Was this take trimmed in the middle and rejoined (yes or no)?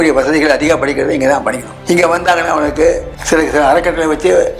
yes